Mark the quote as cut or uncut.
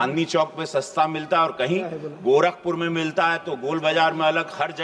uncut